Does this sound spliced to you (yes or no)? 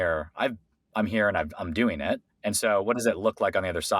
yes